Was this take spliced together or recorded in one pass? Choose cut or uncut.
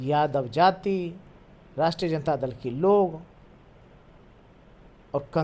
uncut